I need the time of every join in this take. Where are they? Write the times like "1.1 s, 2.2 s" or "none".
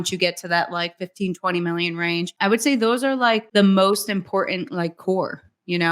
2.3 s, 3.4 s